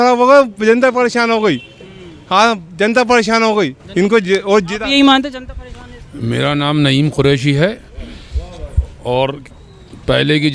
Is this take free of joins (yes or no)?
yes